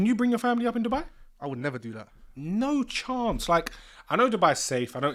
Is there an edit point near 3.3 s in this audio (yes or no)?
no